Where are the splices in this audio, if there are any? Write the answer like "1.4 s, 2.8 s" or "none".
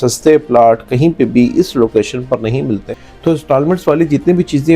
2.9 s